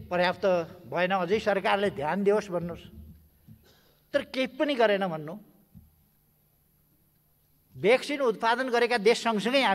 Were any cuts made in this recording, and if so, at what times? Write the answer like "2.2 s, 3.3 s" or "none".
none